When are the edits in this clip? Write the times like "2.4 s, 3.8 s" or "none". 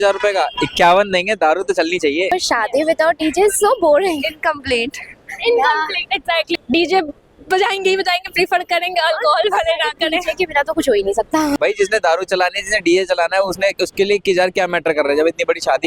2.3 s, 6.6 s, 11.6 s